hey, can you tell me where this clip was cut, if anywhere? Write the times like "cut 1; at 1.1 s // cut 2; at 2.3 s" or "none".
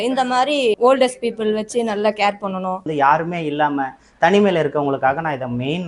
cut 1; at 0.8 s // cut 2; at 2.9 s